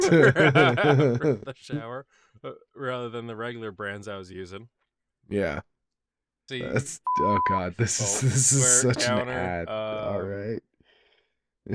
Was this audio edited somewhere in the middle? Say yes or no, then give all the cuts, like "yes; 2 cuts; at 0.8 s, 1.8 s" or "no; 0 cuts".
yes; 1 cut; at 6.4 s